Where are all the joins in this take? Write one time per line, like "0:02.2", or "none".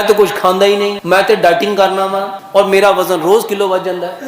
0:01.0
0:02.3